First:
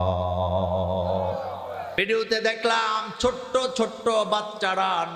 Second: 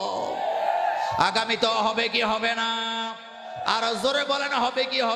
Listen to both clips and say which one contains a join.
first; 1 cut; at 2.0 s

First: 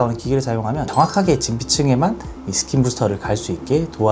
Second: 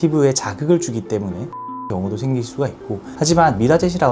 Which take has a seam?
second; 2 cuts; at 1.6 s, 3.1 s

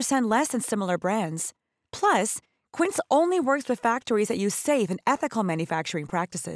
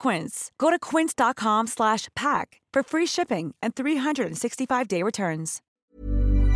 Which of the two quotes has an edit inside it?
second; 1 cut; at 5.6 s

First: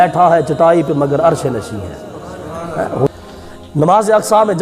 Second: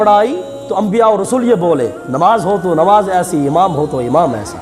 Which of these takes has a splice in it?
first; 1 cut; at 3.1 s

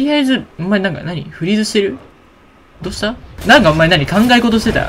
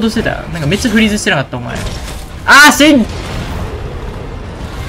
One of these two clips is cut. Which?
first; 1 cut; at 3.3 s

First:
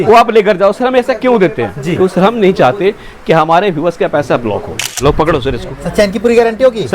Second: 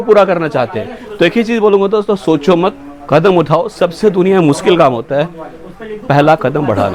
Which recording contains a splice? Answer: first; 1 cut; at 5.0 s

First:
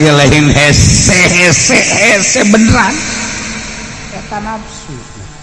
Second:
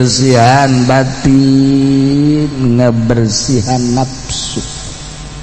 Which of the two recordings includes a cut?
first; 1 cut; at 4.1 s

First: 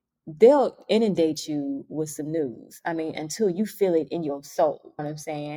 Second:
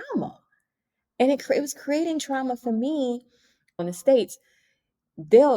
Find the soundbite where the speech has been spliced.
second; 1 cut; at 3.8 s

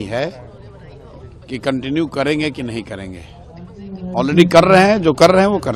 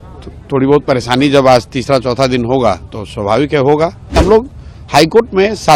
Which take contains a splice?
second; 1 cut; at 4.2 s

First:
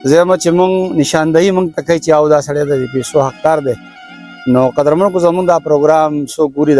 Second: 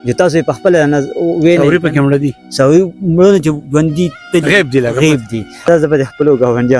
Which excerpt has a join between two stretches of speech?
second; 1 cut; at 5.7 s

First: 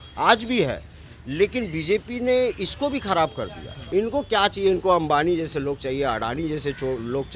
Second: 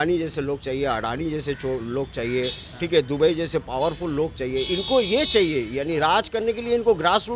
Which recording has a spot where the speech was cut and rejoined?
first; 1 cut; at 3.7 s

